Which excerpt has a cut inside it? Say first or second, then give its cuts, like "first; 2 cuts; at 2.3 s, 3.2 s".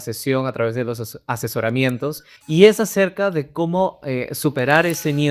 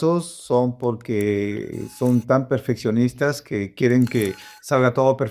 first; 1 cut; at 2.3 s